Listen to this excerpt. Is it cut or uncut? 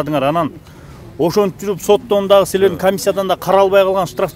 uncut